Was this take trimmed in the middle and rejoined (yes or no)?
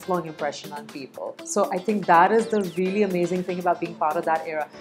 no